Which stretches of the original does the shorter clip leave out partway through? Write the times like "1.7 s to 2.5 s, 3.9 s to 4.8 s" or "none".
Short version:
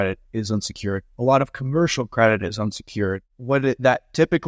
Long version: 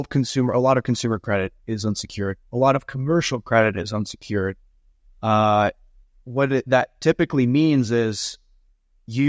4.6 s to 6.2 s